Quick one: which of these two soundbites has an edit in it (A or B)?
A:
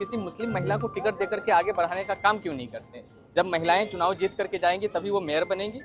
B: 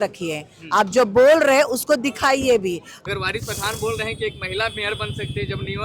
B